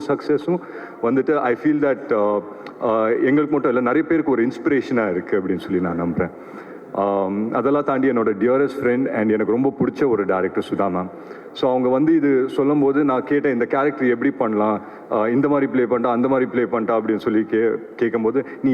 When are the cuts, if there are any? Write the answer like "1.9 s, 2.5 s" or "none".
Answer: none